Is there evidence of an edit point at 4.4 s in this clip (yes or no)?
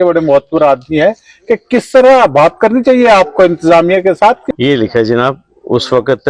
yes